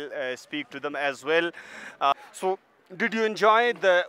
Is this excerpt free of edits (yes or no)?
no